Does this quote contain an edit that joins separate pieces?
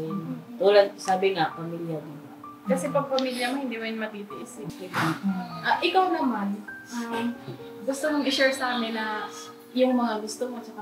yes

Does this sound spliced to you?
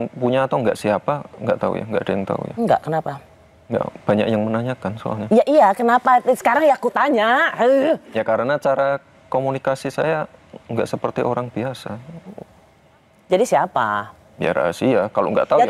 no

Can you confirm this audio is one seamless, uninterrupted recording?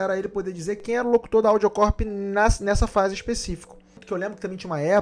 no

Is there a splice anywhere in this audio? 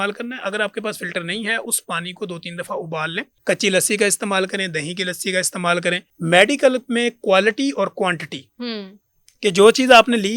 yes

